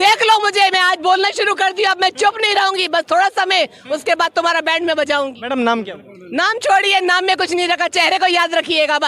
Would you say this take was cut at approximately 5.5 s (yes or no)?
no